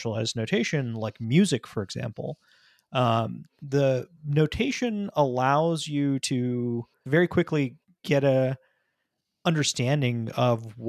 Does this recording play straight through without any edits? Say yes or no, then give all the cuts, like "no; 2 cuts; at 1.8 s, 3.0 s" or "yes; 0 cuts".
no; 1 cut; at 7.1 s